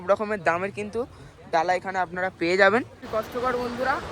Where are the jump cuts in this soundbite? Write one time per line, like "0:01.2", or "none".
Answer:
0:03.0